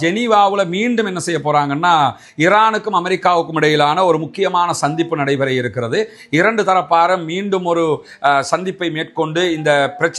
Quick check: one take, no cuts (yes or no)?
yes